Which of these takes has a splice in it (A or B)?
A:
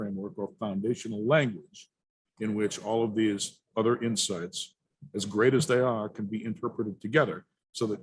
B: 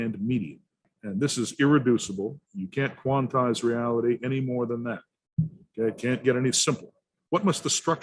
B